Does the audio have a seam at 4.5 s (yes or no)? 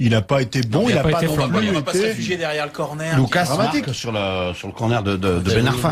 yes